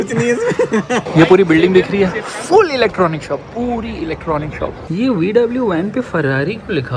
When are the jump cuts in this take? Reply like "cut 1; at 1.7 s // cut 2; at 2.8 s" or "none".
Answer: cut 1; at 1.0 s // cut 2; at 4.7 s